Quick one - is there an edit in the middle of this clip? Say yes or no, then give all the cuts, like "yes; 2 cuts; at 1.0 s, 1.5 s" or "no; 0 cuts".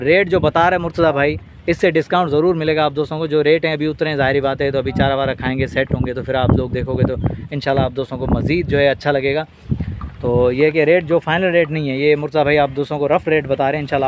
no; 0 cuts